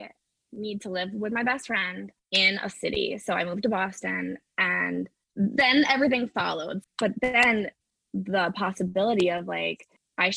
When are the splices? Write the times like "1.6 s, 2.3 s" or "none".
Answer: 6.7 s

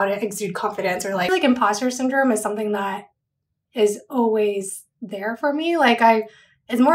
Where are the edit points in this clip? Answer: 1.3 s

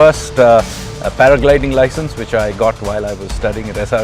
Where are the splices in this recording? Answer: none

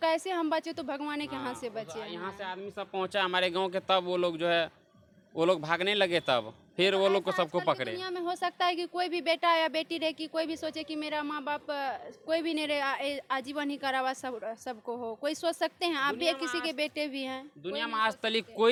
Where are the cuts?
none

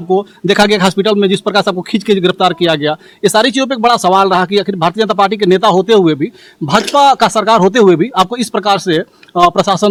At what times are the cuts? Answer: none

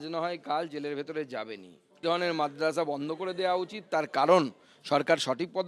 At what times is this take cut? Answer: 2.0 s

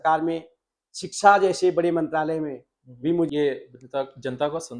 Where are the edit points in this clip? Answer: 3.3 s

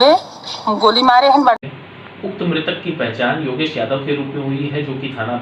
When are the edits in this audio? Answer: 1.7 s

